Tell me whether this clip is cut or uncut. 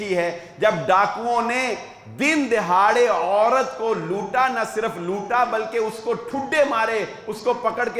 uncut